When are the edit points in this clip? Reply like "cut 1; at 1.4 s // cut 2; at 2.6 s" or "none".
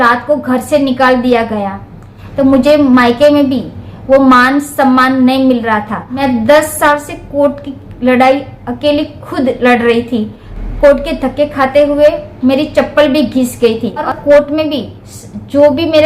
cut 1; at 2.2 s // cut 2; at 6.1 s // cut 3; at 10.4 s // cut 4; at 14.0 s